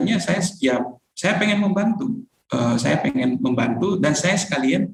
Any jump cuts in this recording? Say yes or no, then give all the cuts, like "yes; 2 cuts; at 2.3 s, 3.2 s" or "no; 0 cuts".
no; 0 cuts